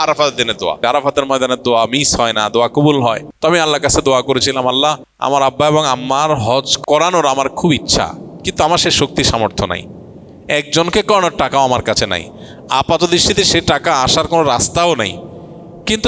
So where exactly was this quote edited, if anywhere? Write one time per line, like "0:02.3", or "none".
0:00.8
0:03.3
0:05.1
0:06.7